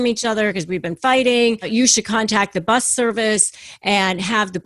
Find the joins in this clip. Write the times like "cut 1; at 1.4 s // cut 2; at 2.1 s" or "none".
cut 1; at 1.6 s